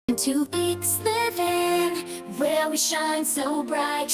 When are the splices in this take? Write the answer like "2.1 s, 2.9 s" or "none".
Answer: none